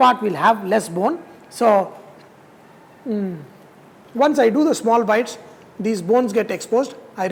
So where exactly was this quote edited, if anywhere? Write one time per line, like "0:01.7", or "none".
none